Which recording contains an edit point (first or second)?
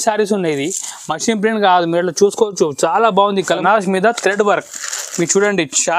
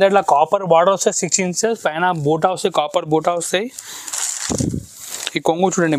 first